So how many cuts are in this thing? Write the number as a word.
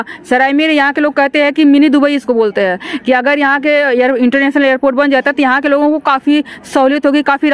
zero